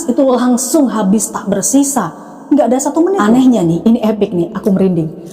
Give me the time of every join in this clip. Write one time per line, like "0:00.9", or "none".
0:03.2